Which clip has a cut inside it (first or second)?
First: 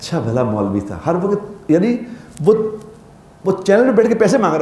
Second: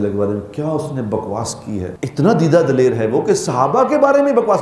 second